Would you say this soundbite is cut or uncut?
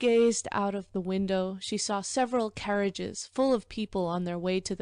cut